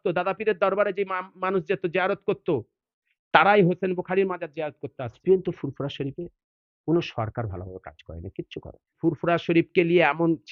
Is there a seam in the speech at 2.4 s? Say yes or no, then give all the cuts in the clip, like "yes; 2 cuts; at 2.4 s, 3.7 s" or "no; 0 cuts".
no; 2 cuts; at 5.2 s, 9.0 s